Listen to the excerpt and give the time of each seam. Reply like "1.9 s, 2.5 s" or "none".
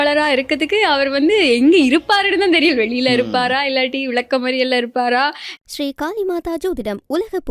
5.5 s

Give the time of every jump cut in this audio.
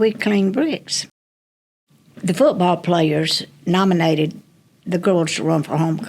1.5 s

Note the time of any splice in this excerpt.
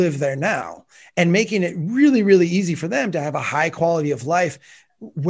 none

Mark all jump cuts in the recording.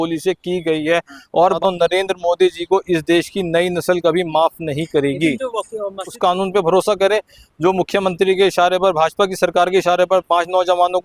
1.6 s, 6.1 s

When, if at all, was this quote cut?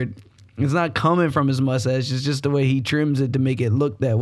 none

